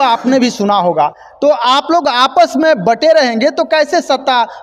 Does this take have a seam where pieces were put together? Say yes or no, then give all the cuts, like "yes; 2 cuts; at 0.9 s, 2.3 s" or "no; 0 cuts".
no; 0 cuts